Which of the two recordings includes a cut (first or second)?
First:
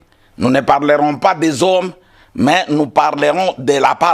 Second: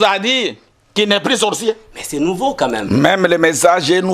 second